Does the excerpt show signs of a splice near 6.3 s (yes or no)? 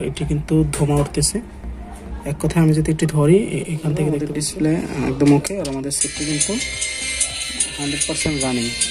no